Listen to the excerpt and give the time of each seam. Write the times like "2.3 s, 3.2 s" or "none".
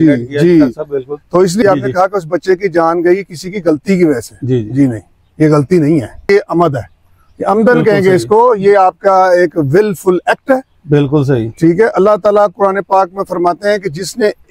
1.6 s, 6.3 s